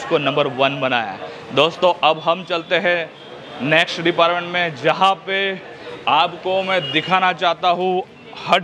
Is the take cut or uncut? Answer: uncut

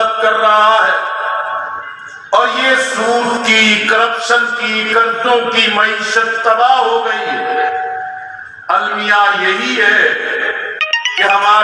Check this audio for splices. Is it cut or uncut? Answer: uncut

